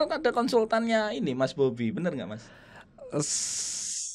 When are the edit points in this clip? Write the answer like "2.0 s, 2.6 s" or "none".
none